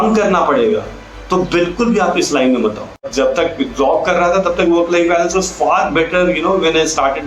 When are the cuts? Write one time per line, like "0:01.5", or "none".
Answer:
0:03.1